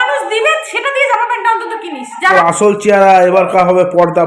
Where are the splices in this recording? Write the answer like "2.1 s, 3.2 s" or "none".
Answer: 2.3 s